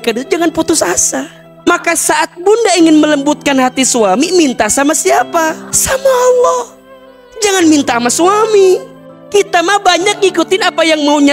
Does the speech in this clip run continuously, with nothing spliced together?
no; 2 cuts; at 1.7 s, 9.0 s

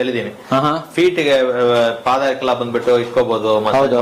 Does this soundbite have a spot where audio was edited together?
no; 0 cuts

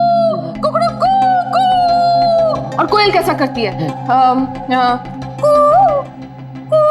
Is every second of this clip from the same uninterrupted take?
no; 1 cut; at 2.7 s

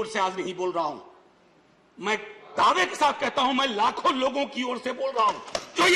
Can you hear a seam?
no; 0 cuts

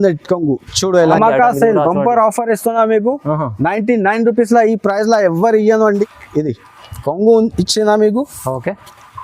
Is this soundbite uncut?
no; 2 cuts; at 1.1 s, 6.1 s

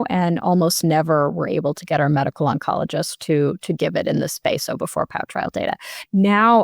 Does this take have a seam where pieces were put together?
no; 0 cuts

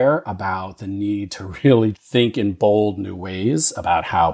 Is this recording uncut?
yes; 0 cuts

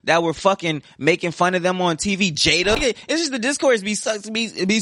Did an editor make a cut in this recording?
yes; 1 cut; at 2.8 s

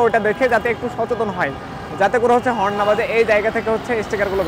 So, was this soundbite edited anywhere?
no; 0 cuts

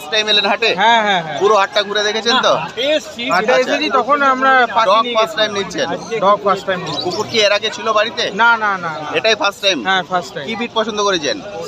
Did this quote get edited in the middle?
no; 0 cuts

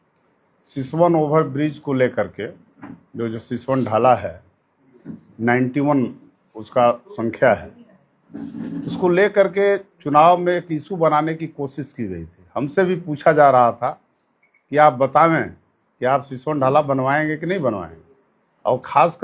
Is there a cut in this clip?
no; 0 cuts

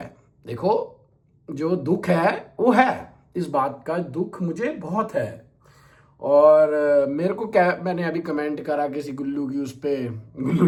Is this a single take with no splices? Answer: yes; 0 cuts

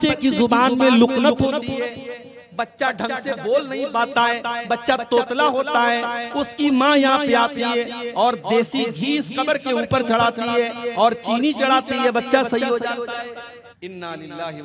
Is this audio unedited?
no; 1 cut; at 13.6 s

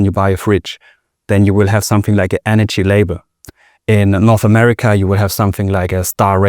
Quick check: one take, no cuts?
yes; 0 cuts

